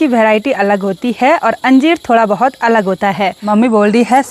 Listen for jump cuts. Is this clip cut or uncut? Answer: cut